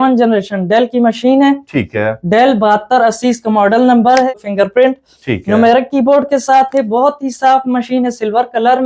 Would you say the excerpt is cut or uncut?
cut